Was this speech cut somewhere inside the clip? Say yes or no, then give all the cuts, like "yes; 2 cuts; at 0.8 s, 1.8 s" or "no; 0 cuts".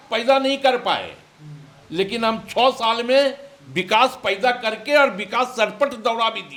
no; 0 cuts